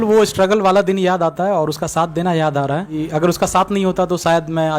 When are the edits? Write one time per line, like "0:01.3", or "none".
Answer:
0:03.0